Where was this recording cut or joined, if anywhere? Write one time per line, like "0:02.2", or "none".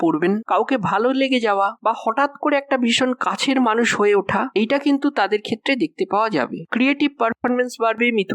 0:06.6